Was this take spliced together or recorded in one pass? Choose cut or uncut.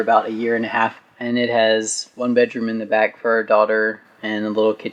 uncut